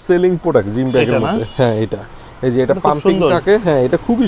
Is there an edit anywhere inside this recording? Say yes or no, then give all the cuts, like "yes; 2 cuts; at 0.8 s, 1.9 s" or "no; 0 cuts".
no; 0 cuts